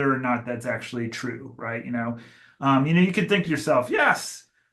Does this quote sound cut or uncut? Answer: uncut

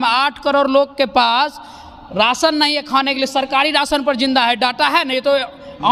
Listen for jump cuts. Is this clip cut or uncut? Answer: uncut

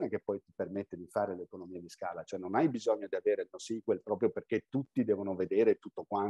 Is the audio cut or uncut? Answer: uncut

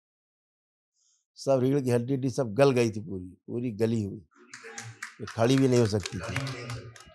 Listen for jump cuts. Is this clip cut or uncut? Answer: uncut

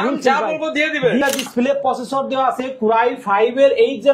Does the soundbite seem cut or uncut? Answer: cut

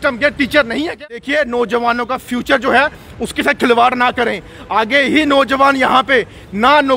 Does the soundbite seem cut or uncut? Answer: cut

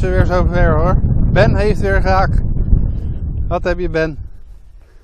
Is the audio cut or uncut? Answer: uncut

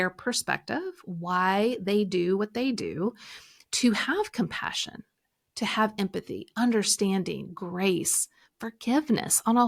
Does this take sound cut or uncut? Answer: uncut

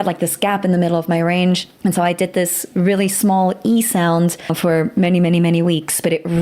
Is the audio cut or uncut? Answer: cut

